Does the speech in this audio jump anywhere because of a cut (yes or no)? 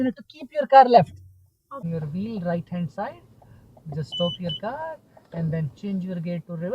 yes